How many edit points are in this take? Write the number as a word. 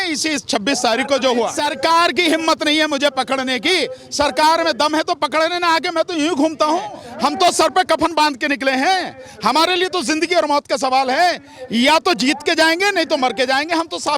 two